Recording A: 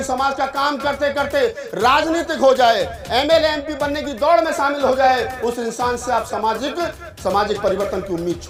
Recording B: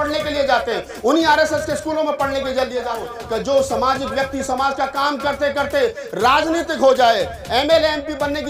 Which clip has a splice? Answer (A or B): B